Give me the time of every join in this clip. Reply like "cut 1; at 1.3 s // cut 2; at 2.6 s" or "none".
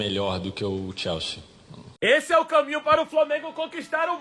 cut 1; at 2.0 s